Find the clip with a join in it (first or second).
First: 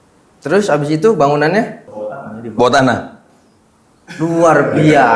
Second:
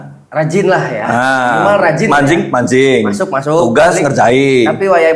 first